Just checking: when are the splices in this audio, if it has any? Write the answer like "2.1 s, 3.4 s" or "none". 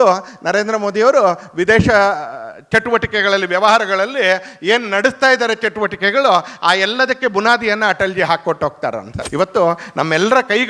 9.1 s